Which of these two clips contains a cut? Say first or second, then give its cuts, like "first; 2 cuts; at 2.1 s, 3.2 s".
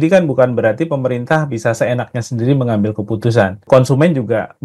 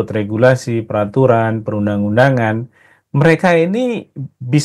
first; 1 cut; at 3.6 s